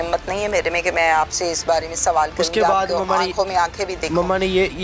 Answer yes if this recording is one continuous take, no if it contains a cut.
yes